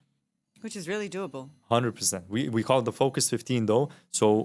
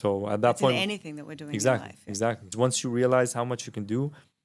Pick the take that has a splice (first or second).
second